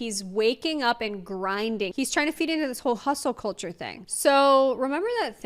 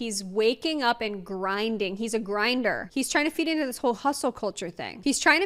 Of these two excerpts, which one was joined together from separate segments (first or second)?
first